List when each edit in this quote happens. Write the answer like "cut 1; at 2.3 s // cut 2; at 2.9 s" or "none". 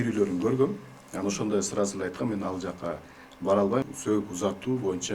cut 1; at 3.8 s